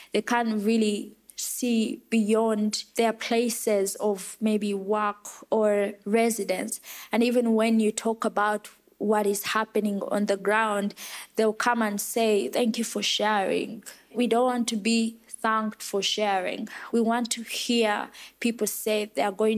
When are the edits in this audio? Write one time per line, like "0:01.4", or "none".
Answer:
0:02.8
0:06.0
0:14.1
0:16.7